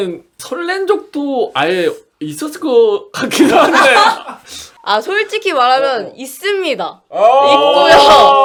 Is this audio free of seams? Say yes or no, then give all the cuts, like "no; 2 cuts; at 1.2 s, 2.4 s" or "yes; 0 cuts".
yes; 0 cuts